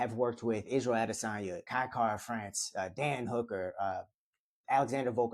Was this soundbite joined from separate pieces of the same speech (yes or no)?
yes